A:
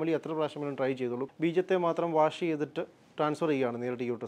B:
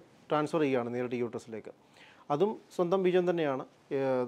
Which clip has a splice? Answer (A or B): A